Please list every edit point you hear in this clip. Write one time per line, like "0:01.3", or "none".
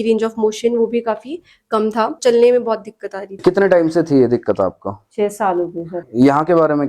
0:02.2
0:03.3
0:05.9